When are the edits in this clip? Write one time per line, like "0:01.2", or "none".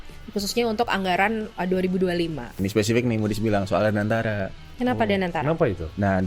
0:02.5